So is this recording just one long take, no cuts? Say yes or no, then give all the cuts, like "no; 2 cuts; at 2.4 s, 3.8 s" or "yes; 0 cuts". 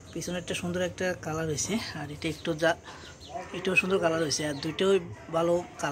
yes; 0 cuts